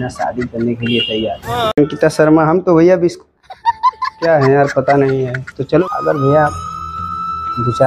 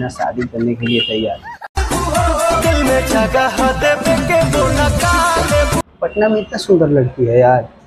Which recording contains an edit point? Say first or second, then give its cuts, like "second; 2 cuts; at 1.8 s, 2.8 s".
first; 2 cuts; at 1.5 s, 5.8 s